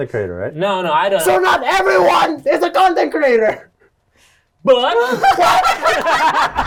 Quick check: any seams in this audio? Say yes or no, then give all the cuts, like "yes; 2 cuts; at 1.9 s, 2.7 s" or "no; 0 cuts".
no; 0 cuts